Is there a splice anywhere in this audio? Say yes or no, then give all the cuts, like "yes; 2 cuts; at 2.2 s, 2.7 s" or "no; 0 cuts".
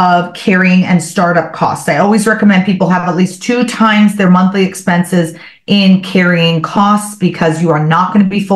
no; 0 cuts